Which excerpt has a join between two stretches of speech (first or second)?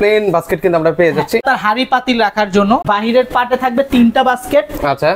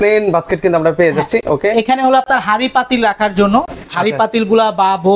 first